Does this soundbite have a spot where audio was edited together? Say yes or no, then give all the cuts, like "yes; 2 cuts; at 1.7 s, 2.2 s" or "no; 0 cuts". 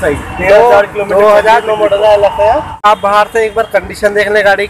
yes; 1 cut; at 2.8 s